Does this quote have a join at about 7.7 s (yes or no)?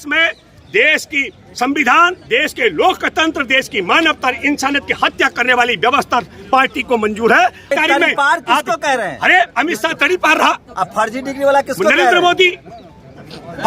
yes